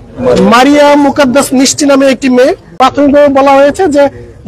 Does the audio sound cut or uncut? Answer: cut